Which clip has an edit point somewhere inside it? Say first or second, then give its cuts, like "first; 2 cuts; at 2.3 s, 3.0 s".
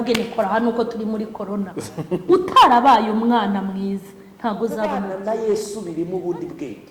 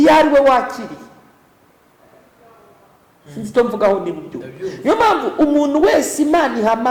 first; 1 cut; at 5.1 s